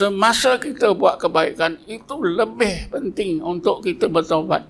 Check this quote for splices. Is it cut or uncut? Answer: uncut